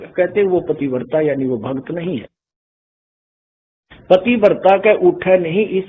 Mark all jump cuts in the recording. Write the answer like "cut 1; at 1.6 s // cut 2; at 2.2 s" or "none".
none